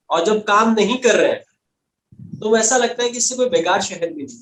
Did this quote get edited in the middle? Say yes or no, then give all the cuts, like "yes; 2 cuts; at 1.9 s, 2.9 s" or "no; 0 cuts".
no; 0 cuts